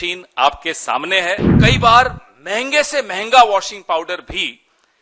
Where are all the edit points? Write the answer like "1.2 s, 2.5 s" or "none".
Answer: 1.6 s